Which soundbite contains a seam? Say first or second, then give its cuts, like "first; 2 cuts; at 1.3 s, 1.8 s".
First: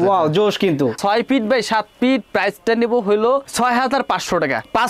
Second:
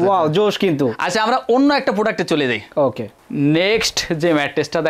first; 1 cut; at 1.0 s